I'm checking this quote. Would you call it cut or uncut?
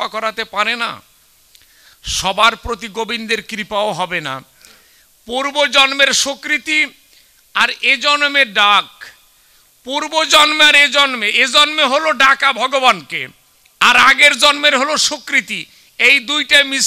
uncut